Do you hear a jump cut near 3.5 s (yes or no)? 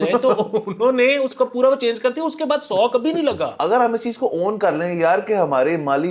yes